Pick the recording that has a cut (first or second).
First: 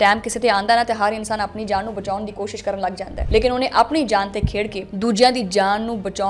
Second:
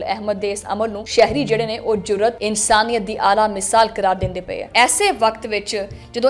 second